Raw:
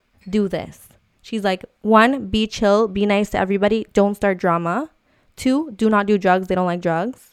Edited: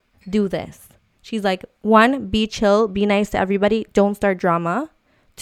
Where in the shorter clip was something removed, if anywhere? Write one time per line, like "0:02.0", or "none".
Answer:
none